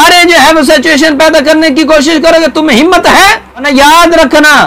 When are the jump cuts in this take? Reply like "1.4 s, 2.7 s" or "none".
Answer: 3.7 s